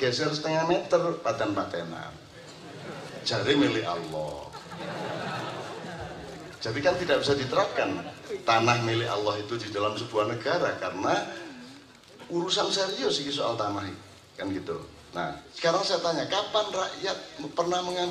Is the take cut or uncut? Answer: cut